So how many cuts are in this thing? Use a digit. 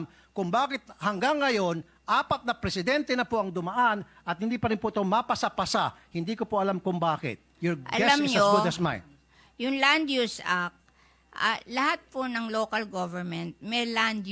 0